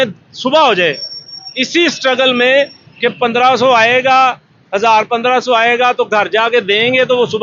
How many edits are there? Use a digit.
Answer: 0